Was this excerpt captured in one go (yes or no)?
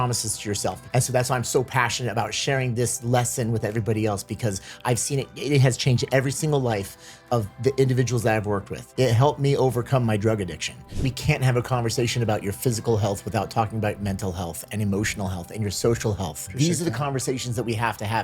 no